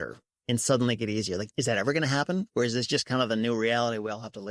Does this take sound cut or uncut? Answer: cut